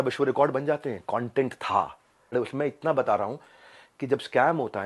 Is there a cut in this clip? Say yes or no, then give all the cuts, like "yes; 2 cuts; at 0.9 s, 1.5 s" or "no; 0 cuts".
yes; 1 cut; at 2.3 s